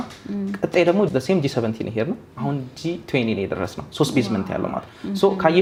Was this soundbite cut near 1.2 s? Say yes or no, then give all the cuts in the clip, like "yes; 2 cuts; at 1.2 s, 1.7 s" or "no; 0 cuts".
no; 0 cuts